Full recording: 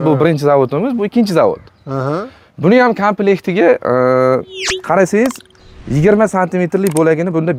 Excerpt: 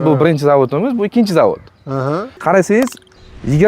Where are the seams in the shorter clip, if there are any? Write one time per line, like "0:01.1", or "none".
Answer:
0:02.3